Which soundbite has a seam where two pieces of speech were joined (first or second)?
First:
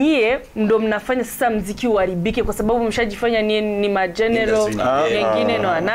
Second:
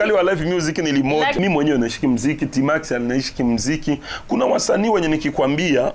second